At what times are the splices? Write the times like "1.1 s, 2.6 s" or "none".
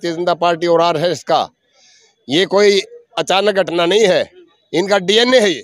none